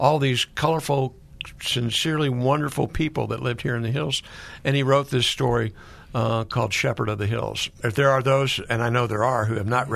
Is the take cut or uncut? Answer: uncut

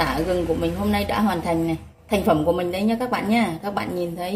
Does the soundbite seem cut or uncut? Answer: cut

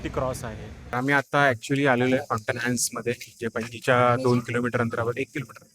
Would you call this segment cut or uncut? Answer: cut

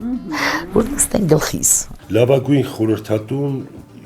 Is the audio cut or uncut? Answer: cut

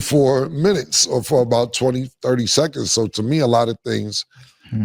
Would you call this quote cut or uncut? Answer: uncut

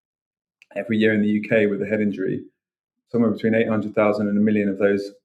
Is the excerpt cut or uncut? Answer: uncut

